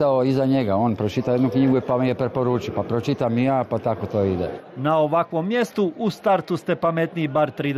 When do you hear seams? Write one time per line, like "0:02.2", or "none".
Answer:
0:02.4